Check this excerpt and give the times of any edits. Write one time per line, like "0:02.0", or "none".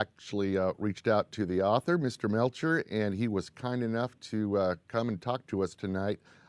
0:02.1